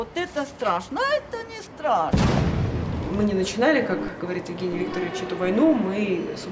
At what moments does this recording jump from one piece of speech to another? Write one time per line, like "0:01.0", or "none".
0:02.5